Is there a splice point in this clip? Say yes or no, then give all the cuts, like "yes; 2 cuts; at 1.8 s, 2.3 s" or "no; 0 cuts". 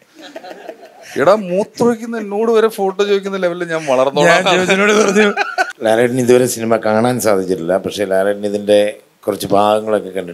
yes; 1 cut; at 5.7 s